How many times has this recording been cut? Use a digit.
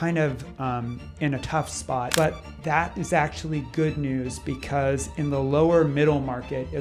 1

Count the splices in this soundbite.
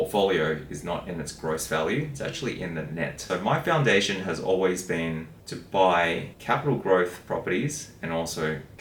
2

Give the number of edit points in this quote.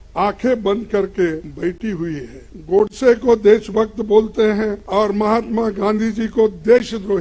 2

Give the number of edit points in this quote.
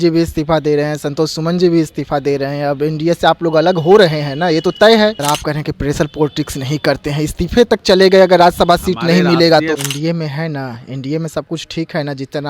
2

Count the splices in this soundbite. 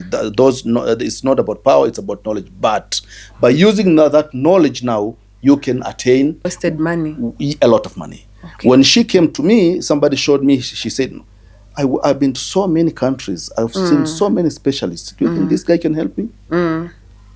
1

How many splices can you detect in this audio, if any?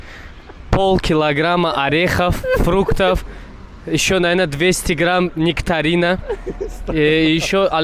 0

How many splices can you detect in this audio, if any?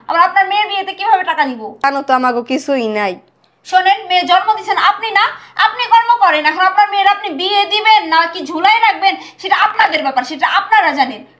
1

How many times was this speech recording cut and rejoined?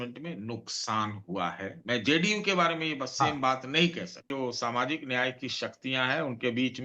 1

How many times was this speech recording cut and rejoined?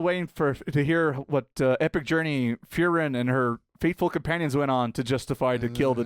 0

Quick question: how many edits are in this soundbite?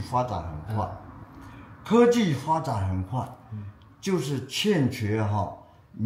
0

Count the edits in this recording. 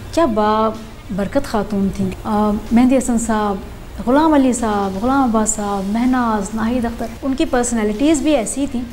2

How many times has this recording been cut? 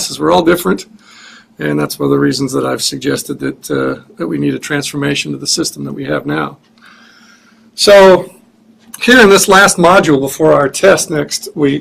1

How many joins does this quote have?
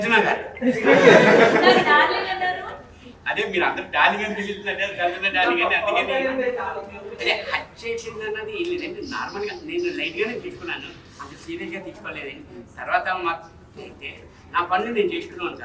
1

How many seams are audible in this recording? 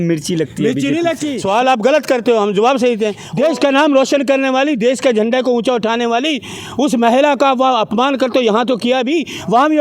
2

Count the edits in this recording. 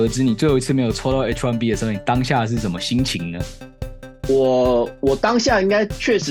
0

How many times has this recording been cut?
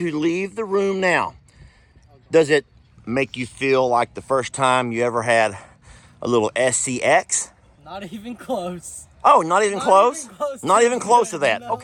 0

